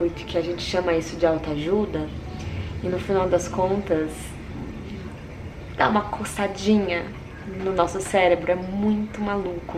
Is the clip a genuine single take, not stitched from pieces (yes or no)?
yes